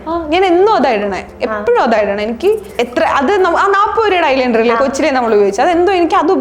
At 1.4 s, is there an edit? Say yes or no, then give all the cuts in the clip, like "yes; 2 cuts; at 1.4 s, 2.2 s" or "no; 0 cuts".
no; 1 cut; at 2.7 s